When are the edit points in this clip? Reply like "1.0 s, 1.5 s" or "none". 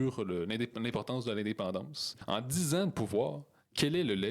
2.2 s

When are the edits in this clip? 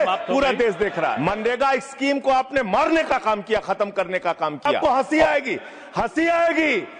1.2 s, 5.0 s

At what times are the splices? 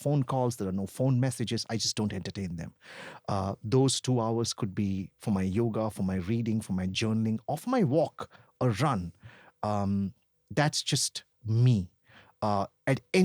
none

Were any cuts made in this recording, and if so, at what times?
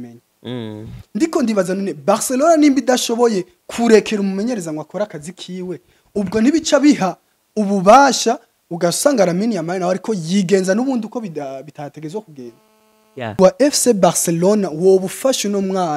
13.4 s

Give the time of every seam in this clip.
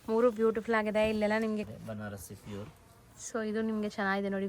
1.7 s

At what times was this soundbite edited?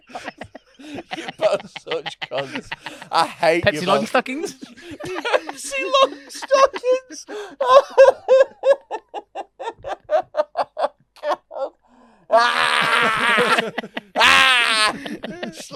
none

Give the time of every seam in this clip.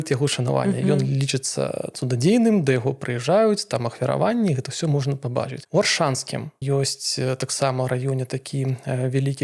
none

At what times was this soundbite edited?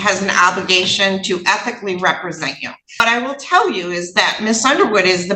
3.0 s

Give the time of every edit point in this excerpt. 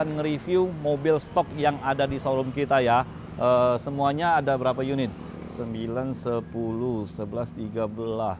none

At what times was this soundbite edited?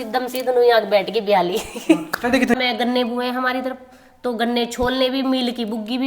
2.6 s

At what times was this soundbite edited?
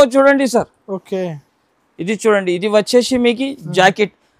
none

